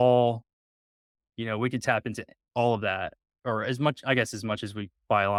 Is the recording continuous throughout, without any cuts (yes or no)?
yes